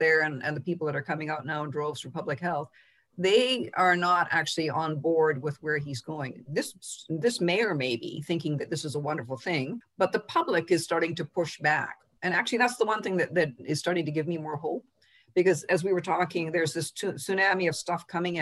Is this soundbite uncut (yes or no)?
yes